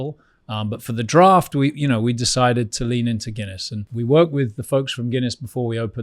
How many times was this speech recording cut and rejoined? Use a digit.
1